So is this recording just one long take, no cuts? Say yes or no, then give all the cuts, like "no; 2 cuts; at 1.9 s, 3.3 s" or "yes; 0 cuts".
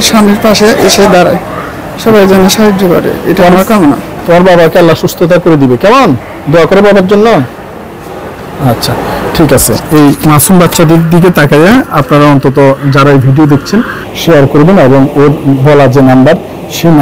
yes; 0 cuts